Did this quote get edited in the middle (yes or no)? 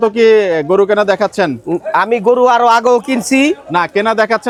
no